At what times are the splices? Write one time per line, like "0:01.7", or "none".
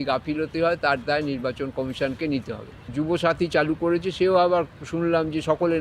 0:02.8